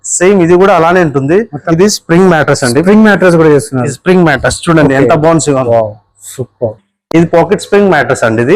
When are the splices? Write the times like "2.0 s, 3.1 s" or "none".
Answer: 1.7 s